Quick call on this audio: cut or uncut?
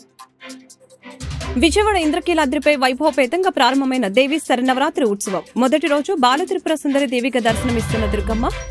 cut